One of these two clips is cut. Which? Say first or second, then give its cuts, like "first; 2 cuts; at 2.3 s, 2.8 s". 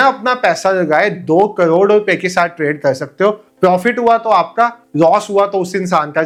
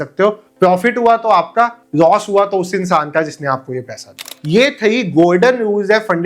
second; 1 cut; at 4.3 s